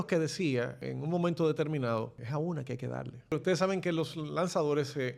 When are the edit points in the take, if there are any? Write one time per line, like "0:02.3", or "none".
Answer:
0:00.9
0:02.2
0:03.3